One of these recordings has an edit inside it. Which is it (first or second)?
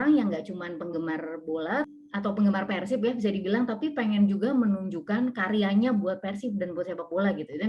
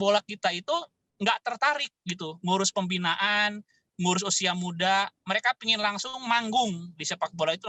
first